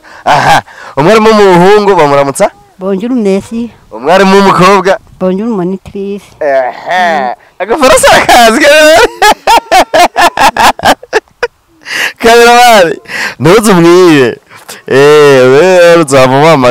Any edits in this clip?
no; 0 cuts

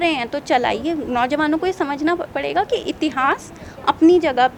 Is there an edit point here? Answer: no; 0 cuts

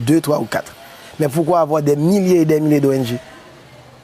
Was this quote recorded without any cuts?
no; 1 cut; at 1.3 s

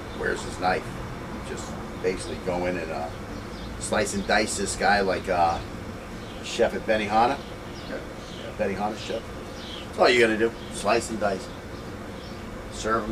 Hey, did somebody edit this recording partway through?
yes; 1 cut; at 8.2 s

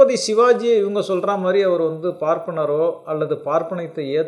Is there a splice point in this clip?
no; 0 cuts

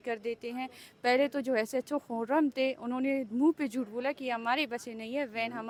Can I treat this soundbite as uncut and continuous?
yes; 0 cuts

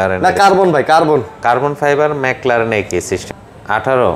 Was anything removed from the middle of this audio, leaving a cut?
yes; 1 cut; at 3.2 s

